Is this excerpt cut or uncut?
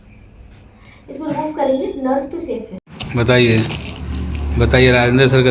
cut